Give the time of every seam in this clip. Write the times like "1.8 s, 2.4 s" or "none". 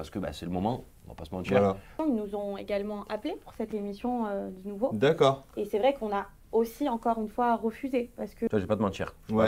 2.0 s, 8.5 s